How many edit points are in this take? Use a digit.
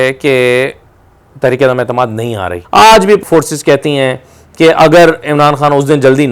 2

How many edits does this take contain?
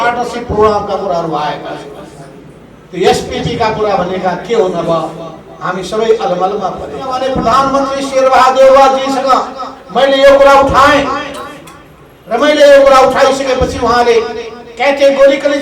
1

